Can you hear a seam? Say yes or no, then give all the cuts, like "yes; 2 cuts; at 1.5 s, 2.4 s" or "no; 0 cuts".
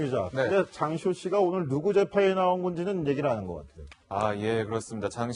yes; 1 cut; at 3.2 s